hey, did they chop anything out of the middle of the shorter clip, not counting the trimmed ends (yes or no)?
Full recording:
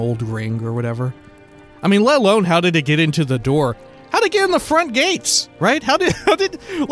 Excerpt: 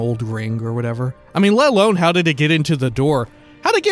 yes